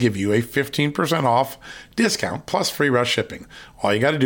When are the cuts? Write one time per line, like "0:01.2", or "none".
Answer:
none